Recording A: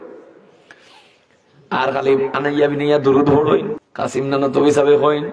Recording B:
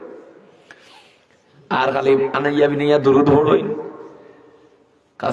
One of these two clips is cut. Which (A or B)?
A